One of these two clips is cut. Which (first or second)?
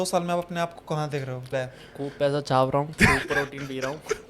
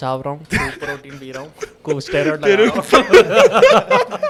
first